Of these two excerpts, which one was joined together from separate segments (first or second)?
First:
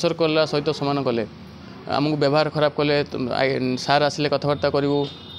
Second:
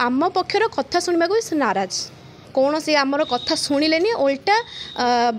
second